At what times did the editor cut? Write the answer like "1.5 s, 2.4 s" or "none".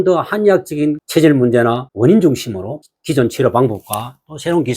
1.0 s, 1.9 s, 2.9 s